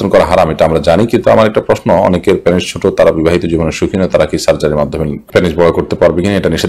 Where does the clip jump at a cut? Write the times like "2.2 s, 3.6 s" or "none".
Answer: none